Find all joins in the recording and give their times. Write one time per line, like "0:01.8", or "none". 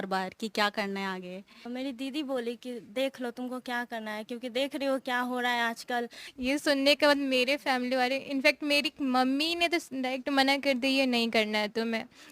0:01.7
0:06.2